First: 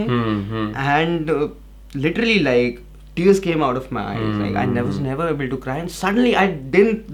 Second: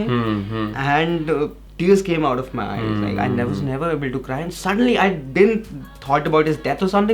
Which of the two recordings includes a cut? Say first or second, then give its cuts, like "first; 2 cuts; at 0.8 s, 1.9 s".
second; 1 cut; at 1.6 s